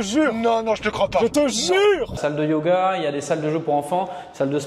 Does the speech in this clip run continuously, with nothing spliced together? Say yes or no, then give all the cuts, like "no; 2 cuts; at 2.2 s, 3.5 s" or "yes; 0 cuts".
no; 1 cut; at 2.1 s